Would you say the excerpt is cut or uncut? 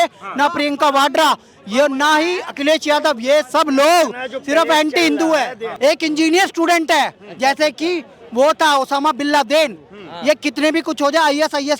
cut